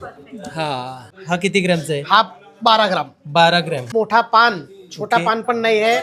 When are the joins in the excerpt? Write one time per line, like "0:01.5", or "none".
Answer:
0:01.1
0:03.9